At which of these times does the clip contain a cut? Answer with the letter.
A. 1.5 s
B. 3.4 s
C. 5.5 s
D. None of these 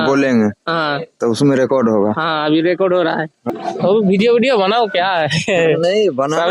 B